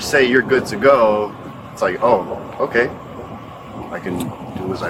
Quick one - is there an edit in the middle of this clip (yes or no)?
no